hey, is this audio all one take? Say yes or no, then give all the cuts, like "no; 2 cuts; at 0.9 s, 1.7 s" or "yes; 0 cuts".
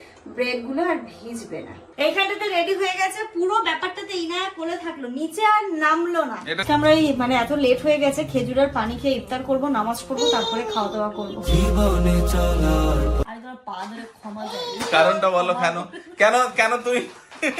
no; 2 cuts; at 6.6 s, 13.2 s